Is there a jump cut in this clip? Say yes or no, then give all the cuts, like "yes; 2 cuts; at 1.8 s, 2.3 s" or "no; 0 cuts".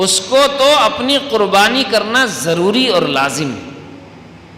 no; 0 cuts